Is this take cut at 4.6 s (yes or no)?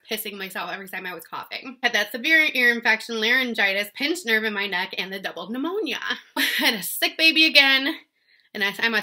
no